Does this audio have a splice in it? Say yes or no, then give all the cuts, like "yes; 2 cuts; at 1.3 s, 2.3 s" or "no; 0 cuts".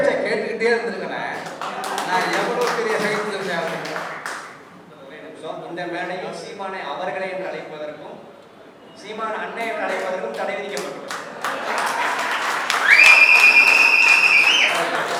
no; 0 cuts